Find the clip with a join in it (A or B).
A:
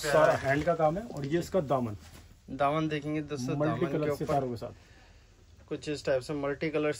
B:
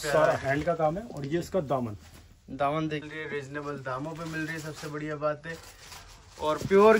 B